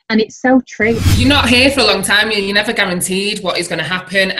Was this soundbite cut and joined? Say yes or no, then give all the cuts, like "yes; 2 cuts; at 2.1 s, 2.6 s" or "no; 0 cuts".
yes; 1 cut; at 1.0 s